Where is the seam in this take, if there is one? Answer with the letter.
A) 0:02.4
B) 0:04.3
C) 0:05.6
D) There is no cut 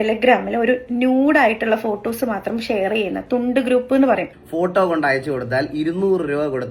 B